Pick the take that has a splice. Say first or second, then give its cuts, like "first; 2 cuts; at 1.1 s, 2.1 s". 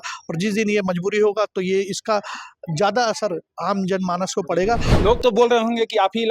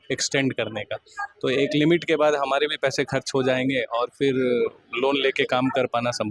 first; 1 cut; at 4.9 s